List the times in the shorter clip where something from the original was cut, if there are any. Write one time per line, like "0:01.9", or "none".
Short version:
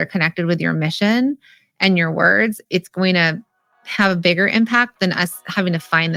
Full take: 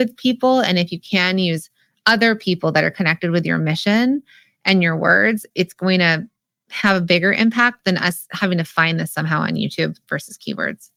none